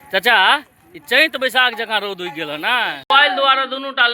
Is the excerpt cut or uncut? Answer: cut